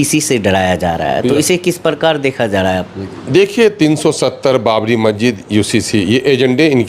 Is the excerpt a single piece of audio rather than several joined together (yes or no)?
yes